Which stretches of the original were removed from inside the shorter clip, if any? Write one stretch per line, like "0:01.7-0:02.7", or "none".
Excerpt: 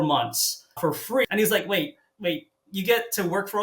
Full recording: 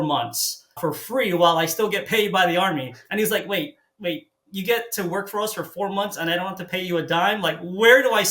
0:01.3-0:03.1